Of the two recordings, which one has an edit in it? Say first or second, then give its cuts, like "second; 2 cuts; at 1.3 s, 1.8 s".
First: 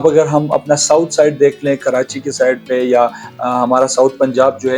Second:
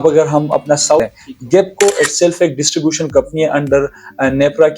second; 1 cut; at 1.0 s